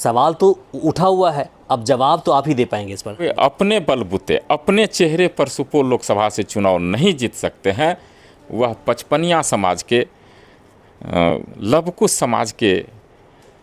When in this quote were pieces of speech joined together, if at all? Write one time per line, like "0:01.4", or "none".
0:03.3